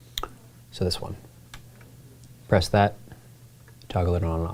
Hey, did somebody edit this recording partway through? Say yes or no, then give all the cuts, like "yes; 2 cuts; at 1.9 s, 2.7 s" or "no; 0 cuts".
no; 0 cuts